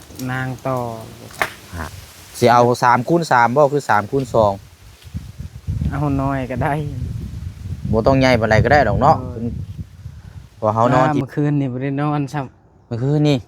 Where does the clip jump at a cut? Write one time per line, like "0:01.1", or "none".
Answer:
0:02.0
0:11.1